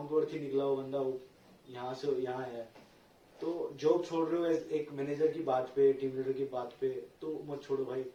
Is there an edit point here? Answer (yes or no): no